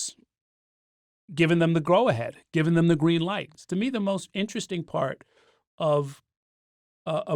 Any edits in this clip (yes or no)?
yes